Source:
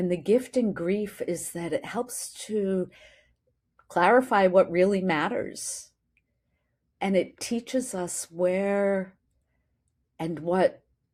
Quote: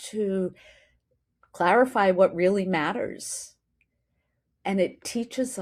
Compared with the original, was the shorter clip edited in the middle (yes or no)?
no